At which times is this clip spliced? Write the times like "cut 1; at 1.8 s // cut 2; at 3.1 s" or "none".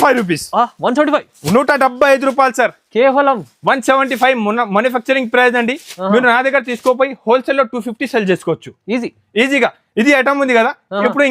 none

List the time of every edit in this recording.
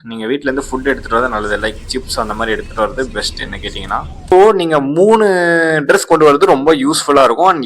cut 1; at 4.3 s

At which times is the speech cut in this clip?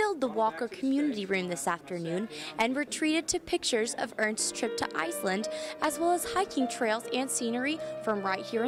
none

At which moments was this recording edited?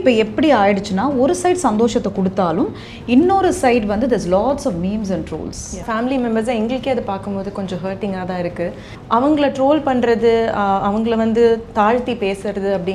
cut 1; at 5.8 s // cut 2; at 8.9 s

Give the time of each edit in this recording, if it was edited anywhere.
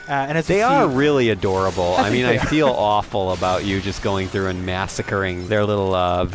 cut 1; at 5.4 s

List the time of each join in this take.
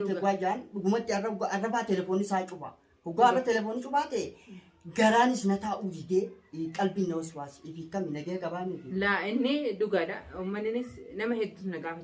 none

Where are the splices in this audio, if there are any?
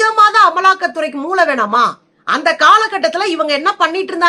none

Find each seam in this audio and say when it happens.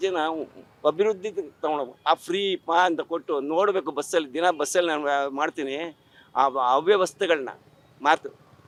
none

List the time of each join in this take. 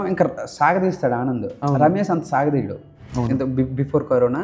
cut 1; at 3.0 s

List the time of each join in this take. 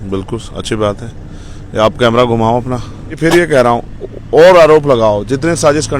cut 1; at 3.2 s

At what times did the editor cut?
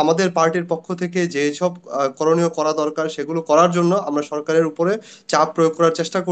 none

